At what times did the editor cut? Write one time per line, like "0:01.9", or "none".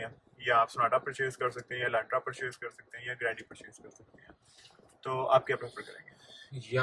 none